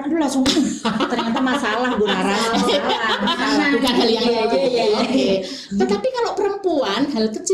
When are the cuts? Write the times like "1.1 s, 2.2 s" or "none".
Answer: none